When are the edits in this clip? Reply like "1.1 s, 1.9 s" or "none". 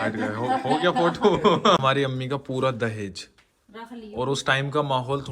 1.8 s